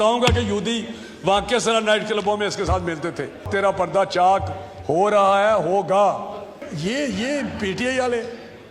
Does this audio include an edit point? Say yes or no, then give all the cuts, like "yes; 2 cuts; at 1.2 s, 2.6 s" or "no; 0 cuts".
yes; 2 cuts; at 3.4 s, 6.6 s